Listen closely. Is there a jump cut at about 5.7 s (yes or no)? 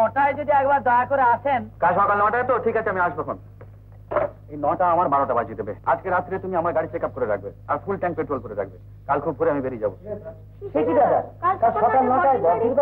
yes